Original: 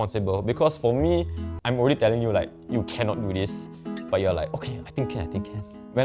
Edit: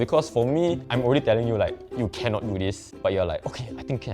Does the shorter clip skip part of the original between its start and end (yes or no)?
yes